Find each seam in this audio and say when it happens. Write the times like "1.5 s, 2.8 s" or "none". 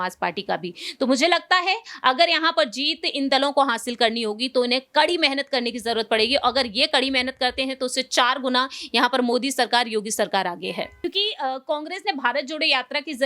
10.9 s